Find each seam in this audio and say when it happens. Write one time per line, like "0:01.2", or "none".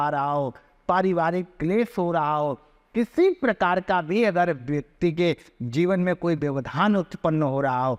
none